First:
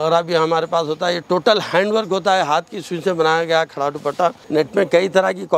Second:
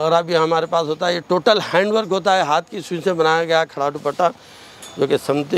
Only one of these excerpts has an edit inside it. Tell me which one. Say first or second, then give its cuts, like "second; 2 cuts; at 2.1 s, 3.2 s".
first; 1 cut; at 4.4 s